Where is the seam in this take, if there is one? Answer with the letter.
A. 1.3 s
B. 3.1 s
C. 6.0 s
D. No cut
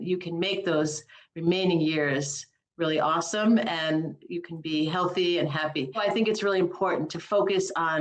C